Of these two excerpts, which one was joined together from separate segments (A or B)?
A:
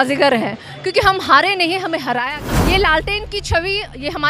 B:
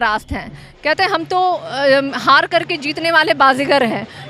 A